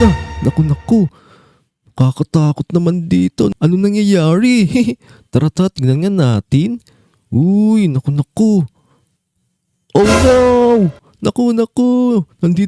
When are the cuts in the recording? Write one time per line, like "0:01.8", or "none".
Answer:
none